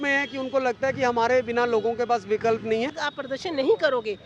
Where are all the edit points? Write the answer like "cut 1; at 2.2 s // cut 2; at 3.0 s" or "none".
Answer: cut 1; at 3.1 s